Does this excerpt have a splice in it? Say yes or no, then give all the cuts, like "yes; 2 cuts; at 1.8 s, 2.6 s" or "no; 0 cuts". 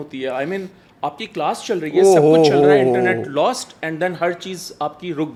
no; 0 cuts